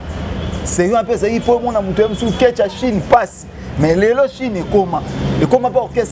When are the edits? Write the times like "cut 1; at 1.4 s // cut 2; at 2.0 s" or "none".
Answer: none